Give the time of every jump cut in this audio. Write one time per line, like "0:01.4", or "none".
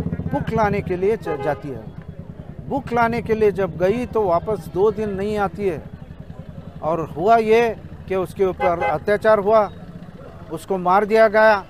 none